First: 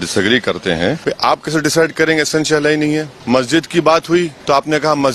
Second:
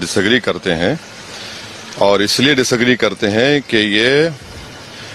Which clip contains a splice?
first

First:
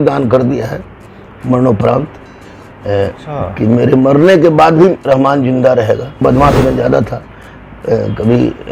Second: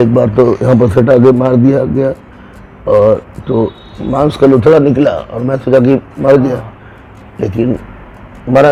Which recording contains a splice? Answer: first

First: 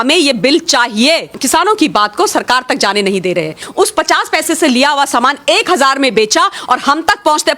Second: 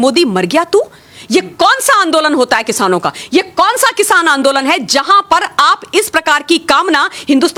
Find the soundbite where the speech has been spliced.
first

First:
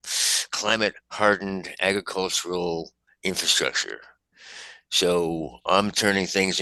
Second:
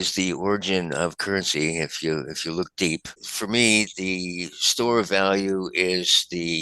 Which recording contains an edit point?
second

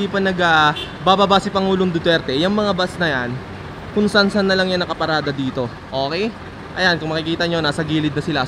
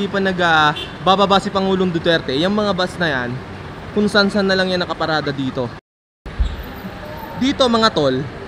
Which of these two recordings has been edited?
second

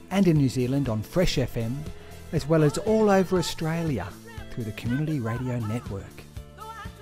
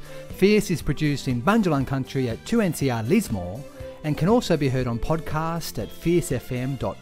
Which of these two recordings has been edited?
first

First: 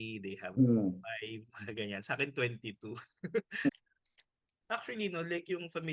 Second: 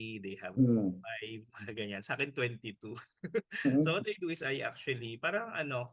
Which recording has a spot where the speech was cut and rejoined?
first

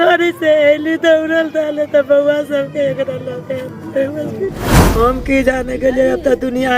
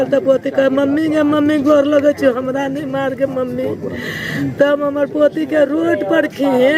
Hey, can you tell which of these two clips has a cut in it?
first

